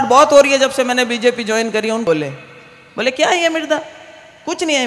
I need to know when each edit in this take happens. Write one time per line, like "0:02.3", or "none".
0:02.0